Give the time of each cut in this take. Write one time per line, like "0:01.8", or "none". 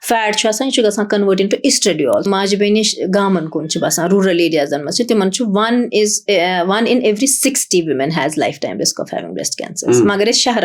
0:02.2

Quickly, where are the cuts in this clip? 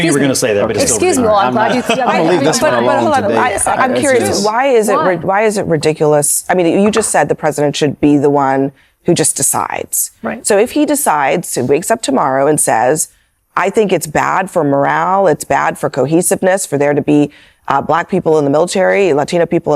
none

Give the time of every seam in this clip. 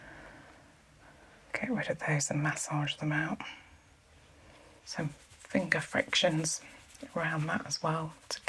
0:04.8

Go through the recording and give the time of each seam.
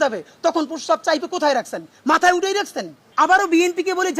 0:03.0

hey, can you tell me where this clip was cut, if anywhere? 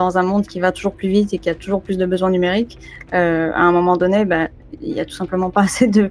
none

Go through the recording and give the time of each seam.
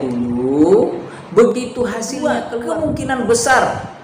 0:02.4

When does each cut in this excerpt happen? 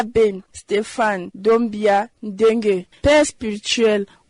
none

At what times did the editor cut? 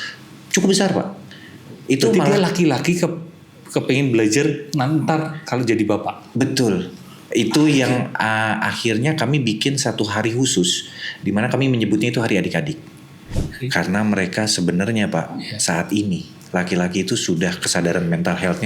0:13.4

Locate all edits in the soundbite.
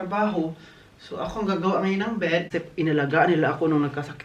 0:02.5

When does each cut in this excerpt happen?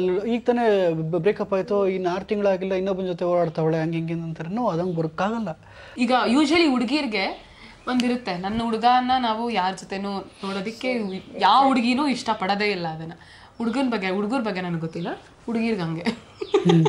0:05.9

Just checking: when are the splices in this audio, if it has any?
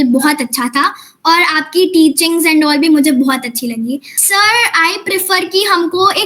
0:04.1

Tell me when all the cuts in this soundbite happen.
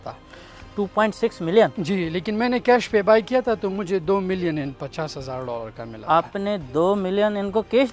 none

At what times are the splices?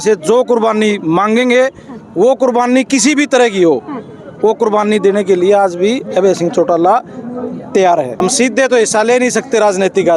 0:08.2

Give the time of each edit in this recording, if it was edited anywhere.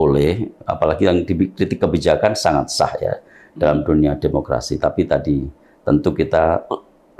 none

